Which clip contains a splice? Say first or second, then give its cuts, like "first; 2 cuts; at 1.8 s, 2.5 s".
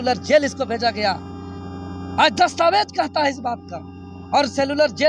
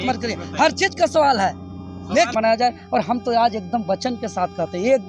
second; 1 cut; at 2.3 s